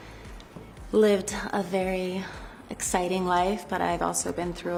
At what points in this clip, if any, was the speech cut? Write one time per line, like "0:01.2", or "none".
none